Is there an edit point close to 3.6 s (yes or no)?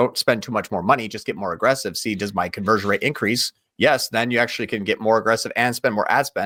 no